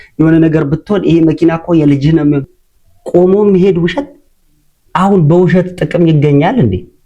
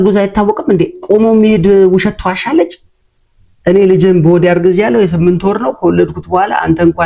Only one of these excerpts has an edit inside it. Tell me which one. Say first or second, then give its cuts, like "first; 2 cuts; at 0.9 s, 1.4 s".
first; 1 cut; at 2.6 s